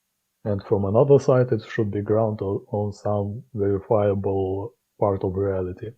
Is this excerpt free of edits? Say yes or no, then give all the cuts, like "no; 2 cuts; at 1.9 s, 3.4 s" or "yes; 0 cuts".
no; 1 cut; at 4.8 s